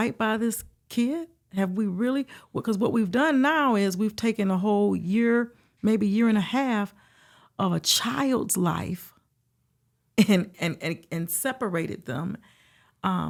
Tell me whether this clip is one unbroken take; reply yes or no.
yes